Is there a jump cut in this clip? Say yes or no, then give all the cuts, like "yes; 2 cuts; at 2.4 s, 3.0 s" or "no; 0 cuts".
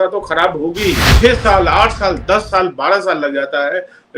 yes; 1 cut; at 1.1 s